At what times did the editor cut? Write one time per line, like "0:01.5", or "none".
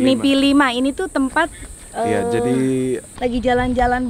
0:03.1